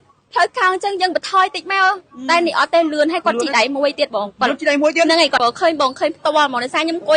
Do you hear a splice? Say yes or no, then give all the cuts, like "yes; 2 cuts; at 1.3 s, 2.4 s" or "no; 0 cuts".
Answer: yes; 1 cut; at 5.4 s